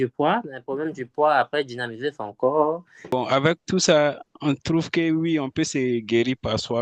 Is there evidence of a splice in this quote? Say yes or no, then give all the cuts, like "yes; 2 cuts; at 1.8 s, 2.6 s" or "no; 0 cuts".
yes; 1 cut; at 2.9 s